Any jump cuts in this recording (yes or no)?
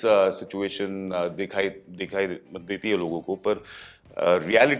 no